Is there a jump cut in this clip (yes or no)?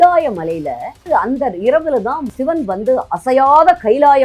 yes